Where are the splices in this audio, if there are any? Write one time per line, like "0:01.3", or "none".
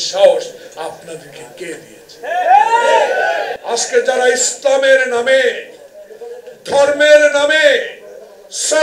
0:03.5